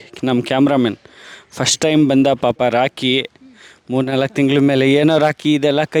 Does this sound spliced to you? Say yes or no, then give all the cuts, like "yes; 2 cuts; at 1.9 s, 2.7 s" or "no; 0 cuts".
no; 0 cuts